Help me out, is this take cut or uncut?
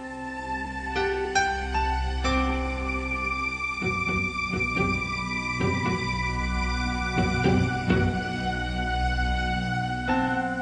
cut